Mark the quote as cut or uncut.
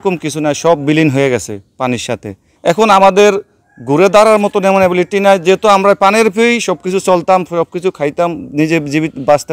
uncut